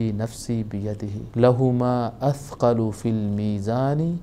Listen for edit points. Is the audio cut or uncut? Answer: cut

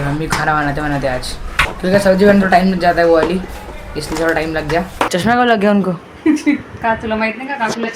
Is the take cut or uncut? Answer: cut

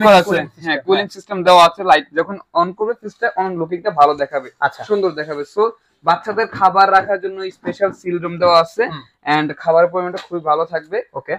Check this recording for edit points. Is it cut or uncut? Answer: uncut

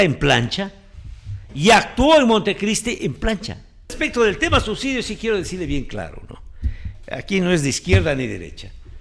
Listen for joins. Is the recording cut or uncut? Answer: cut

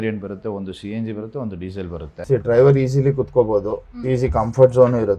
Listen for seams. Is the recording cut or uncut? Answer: cut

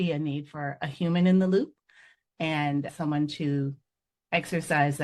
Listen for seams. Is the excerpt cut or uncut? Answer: cut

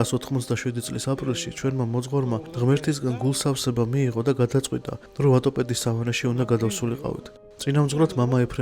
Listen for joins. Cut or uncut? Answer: cut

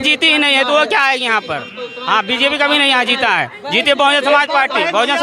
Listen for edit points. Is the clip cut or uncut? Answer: uncut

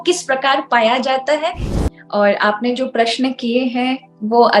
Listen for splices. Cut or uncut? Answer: cut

